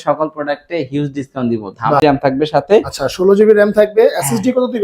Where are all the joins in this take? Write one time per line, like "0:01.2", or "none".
0:02.0